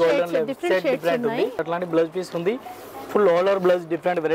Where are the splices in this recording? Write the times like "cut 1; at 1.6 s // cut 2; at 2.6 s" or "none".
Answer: cut 1; at 1.6 s